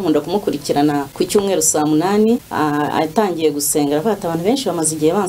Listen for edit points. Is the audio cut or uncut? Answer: cut